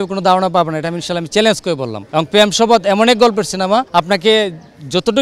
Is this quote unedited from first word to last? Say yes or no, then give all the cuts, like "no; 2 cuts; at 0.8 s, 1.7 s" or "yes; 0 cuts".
no; 2 cuts; at 2.0 s, 3.9 s